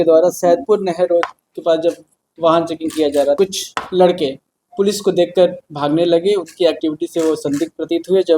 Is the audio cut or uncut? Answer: cut